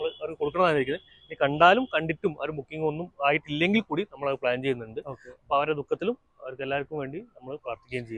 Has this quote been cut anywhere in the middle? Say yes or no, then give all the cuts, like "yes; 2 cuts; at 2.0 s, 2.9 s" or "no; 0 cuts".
no; 0 cuts